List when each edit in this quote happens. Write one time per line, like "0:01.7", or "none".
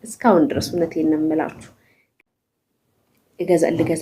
0:02.2